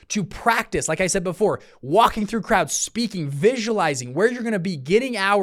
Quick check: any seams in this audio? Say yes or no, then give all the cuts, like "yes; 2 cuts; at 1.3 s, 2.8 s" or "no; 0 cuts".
no; 0 cuts